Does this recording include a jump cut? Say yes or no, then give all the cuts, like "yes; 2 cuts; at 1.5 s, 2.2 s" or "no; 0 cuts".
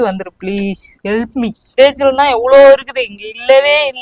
yes; 1 cut; at 1.7 s